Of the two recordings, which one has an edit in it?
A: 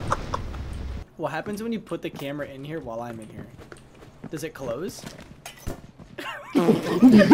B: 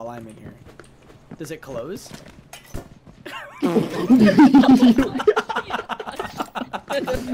A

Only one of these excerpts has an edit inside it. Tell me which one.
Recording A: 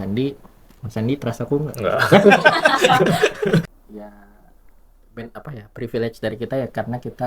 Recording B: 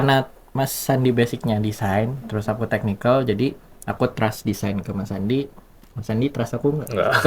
A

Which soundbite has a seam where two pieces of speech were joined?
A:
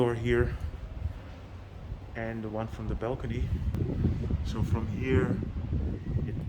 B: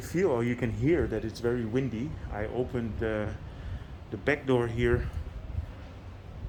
A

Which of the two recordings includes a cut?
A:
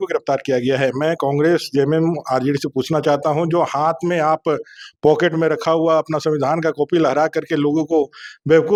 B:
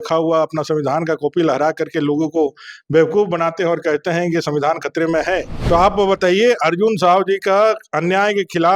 B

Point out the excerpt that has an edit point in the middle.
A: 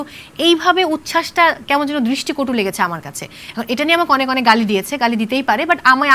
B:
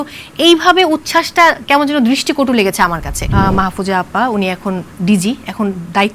B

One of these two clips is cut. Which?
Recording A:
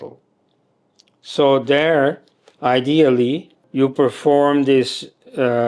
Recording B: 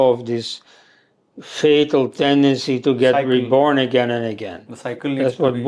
A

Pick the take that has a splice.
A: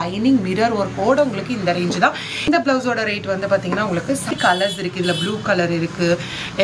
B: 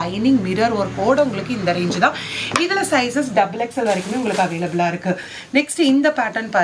A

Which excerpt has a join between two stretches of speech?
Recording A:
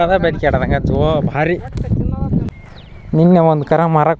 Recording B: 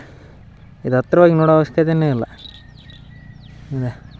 A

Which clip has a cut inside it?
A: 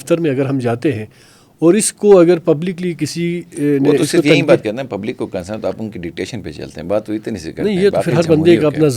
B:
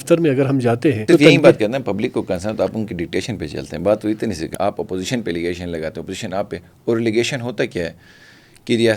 B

